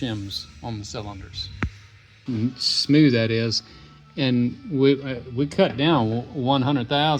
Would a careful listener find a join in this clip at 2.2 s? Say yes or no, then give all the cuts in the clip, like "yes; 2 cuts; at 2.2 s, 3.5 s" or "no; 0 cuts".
yes; 1 cut; at 2.2 s